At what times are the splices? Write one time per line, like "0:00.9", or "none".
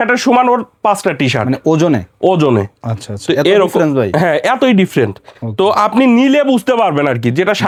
none